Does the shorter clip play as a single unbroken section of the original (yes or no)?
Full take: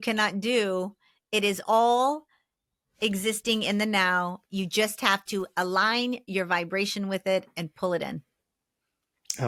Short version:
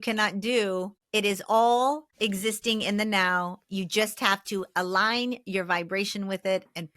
no